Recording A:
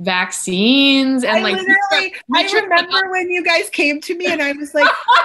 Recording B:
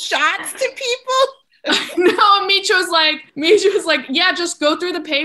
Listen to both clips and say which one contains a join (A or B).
B